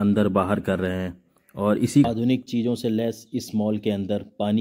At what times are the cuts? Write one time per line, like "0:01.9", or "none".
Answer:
0:02.1